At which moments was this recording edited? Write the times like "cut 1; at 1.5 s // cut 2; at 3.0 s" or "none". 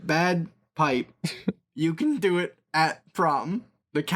none